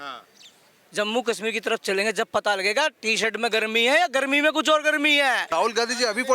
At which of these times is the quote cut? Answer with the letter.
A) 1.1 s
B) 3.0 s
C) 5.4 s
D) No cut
C